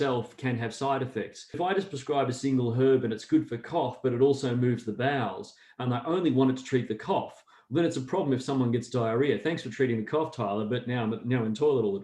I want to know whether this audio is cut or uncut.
cut